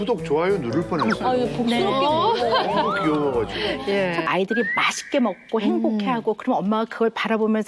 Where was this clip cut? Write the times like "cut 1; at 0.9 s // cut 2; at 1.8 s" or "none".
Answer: cut 1; at 4.2 s

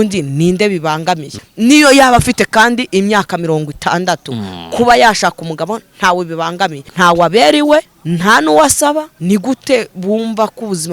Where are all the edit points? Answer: cut 1; at 1.3 s // cut 2; at 6.9 s // cut 3; at 8.0 s // cut 4; at 9.1 s

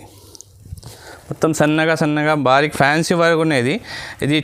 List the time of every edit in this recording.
none

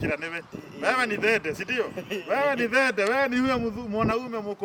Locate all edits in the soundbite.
none

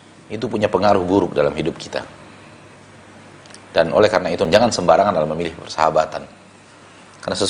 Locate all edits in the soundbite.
cut 1; at 4.5 s

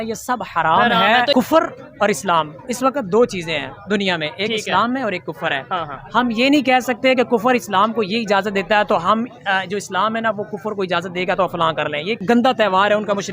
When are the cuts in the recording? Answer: cut 1; at 1.3 s // cut 2; at 12.2 s

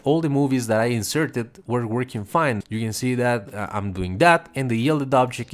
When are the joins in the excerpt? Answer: cut 1; at 2.6 s

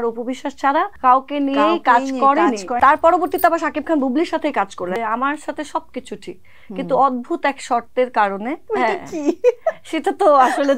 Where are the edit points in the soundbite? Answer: cut 1; at 0.9 s // cut 2; at 2.7 s // cut 3; at 5.0 s // cut 4; at 8.6 s

